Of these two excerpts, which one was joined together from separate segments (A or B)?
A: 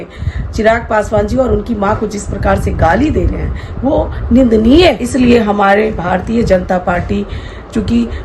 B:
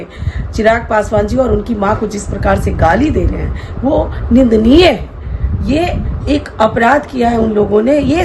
A